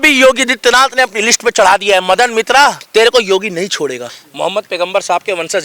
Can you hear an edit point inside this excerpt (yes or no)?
yes